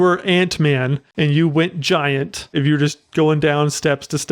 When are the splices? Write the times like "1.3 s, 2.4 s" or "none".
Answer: 1.0 s, 2.5 s